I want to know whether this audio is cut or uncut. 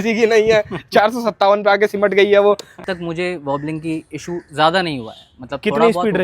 cut